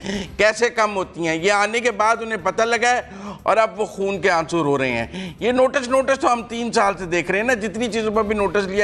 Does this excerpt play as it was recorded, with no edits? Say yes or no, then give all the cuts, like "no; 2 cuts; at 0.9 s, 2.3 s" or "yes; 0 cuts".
yes; 0 cuts